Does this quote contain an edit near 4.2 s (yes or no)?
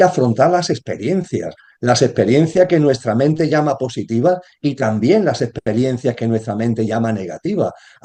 no